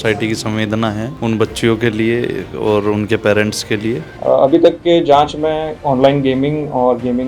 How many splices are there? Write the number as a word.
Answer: three